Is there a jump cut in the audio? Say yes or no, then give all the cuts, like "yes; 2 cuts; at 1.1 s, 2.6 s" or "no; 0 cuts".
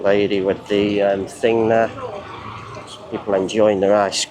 no; 0 cuts